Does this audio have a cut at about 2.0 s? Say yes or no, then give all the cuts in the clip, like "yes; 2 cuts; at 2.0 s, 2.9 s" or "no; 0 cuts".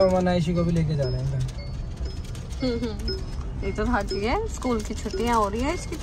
no; 0 cuts